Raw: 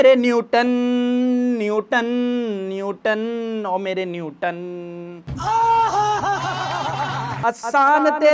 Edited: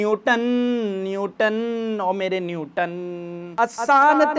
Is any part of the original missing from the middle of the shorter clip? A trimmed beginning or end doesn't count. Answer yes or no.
yes